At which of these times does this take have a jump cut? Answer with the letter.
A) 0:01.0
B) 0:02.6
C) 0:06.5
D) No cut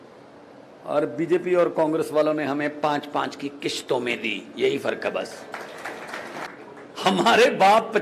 C